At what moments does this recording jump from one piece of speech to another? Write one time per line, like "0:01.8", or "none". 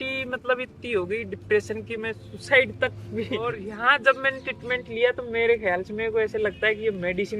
0:03.7